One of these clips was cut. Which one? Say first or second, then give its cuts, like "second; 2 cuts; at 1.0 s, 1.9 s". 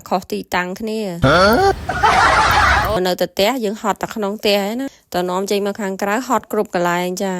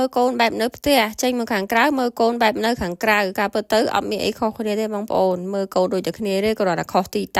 first; 1 cut; at 3.0 s